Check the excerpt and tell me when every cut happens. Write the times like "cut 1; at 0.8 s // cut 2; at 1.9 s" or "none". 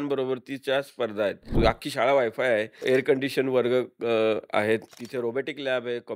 cut 1; at 1.5 s // cut 2; at 2.8 s // cut 3; at 5.0 s